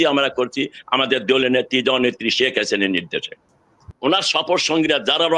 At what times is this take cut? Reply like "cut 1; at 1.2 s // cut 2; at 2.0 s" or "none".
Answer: cut 1; at 3.9 s